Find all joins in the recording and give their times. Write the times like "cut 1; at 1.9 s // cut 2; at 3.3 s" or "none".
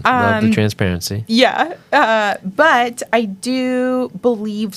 none